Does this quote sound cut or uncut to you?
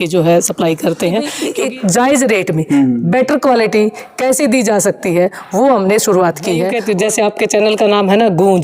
cut